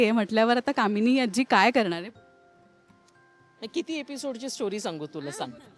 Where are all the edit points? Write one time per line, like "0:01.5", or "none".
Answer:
none

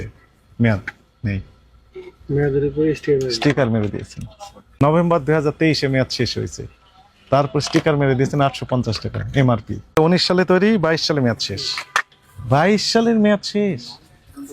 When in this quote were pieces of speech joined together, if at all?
0:04.8
0:09.9

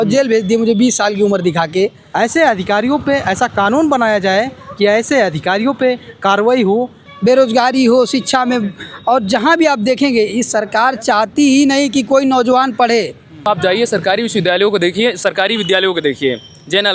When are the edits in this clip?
0:02.0
0:07.1
0:13.5

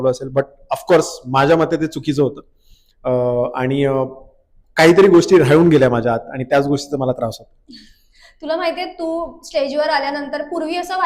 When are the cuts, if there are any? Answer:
none

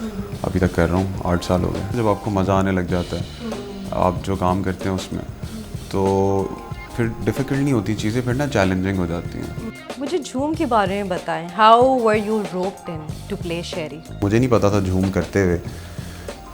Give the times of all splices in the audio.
0:01.9
0:09.6
0:14.2

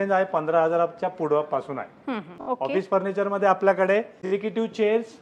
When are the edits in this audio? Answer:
0:02.3
0:04.2

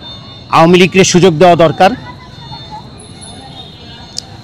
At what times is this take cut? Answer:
none

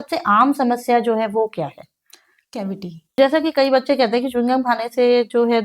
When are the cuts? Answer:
0:03.2

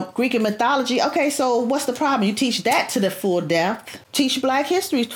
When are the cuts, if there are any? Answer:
0:03.9

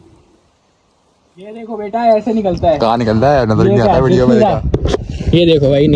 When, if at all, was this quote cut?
none

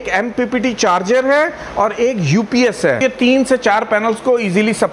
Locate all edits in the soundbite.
0:03.0

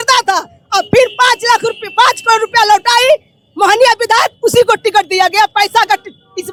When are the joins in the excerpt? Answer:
none

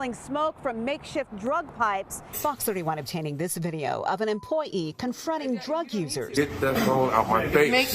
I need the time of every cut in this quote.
0:02.3
0:06.4

